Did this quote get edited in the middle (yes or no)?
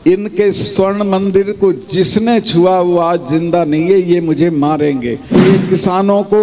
yes